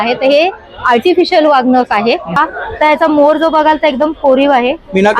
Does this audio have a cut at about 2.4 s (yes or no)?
yes